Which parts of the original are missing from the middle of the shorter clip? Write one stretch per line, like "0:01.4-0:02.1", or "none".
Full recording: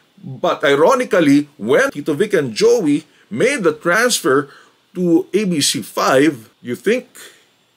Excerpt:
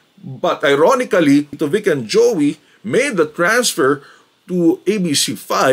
0:01.5-0:02.0